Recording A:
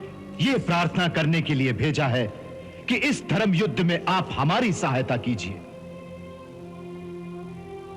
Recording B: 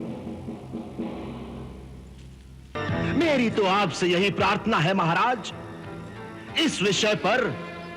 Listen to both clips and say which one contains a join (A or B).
B